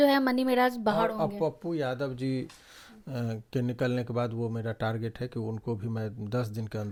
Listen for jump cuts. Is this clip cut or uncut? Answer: uncut